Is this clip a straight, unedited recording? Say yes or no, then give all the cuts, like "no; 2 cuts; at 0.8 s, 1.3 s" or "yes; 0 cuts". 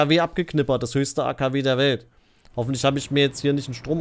yes; 0 cuts